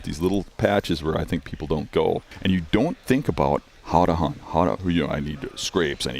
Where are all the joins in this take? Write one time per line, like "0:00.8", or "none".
0:02.3
0:03.7

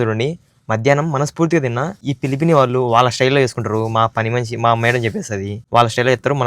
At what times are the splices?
0:02.0
0:05.6

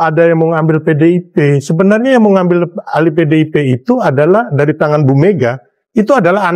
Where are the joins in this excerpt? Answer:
none

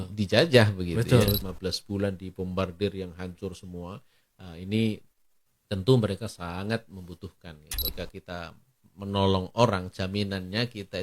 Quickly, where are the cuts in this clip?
0:01.4
0:07.9

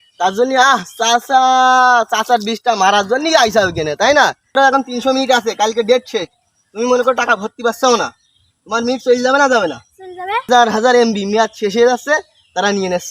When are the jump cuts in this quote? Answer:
0:04.6
0:10.5

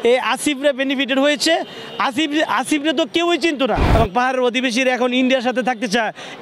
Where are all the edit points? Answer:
0:03.8

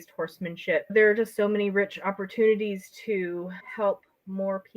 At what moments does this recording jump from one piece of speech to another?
0:00.9

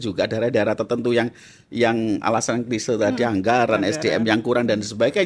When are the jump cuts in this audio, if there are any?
none

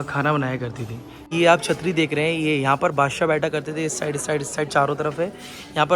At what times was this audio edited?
0:01.3

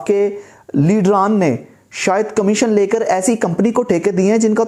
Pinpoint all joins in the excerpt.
none

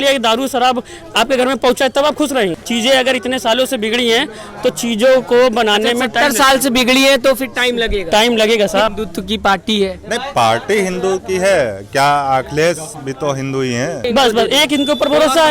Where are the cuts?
0:02.6
0:08.9
0:14.0

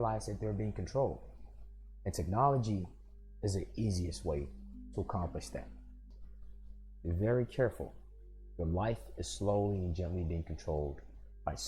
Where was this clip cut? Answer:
0:06.0

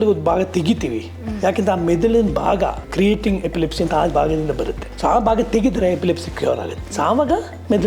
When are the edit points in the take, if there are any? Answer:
0:04.8
0:06.8

